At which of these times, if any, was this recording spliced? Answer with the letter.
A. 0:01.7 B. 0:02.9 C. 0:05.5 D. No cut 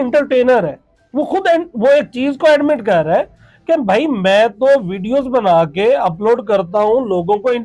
D